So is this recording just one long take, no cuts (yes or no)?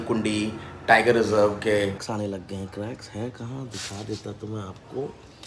no